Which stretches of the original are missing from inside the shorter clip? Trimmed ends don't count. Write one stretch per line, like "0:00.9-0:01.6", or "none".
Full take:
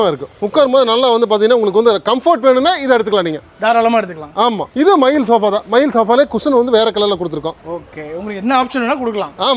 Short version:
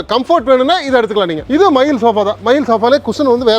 0:03.4-0:04.7